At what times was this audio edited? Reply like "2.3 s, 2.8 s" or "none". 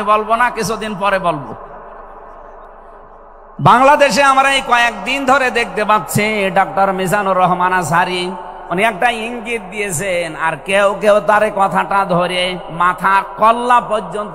3.5 s

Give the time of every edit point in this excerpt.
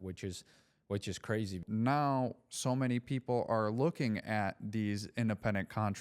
1.6 s

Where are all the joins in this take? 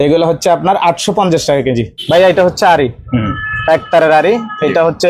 2.0 s

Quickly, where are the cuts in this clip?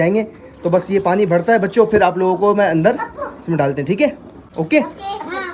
none

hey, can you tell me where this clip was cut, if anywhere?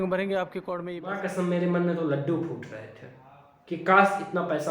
1.1 s

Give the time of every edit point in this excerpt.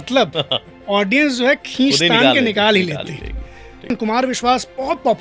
3.9 s

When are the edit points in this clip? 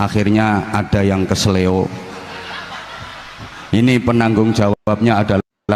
none

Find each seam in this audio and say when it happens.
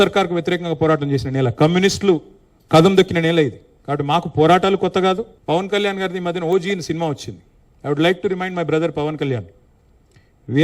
5.3 s

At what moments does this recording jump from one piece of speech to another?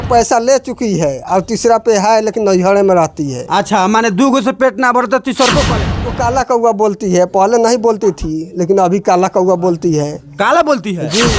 6.0 s

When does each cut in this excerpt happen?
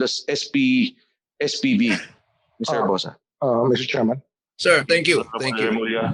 none

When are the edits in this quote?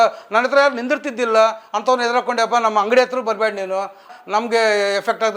4.1 s

